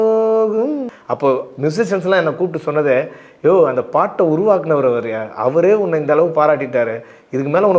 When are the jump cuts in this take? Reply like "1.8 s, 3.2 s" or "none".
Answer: 0.9 s